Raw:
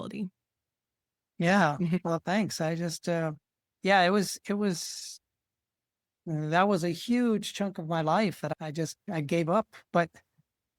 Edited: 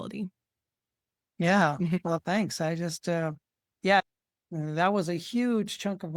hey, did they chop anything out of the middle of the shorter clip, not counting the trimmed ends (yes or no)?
yes